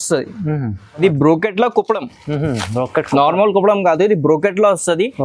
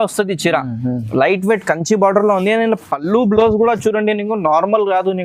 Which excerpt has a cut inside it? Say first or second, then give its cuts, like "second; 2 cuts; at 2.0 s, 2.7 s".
first; 1 cut; at 1.0 s